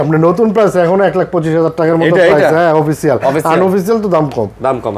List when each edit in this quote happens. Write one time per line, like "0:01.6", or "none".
none